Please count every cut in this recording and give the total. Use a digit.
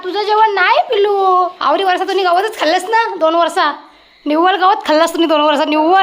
1